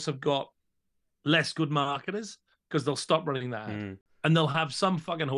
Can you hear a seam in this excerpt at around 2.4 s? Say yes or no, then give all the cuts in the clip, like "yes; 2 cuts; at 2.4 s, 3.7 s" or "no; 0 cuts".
no; 1 cut; at 4.0 s